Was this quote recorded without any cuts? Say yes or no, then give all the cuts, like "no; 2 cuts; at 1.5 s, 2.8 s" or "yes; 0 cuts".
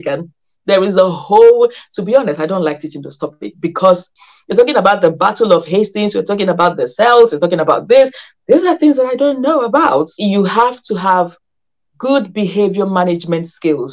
no; 2 cuts; at 4.1 s, 10.1 s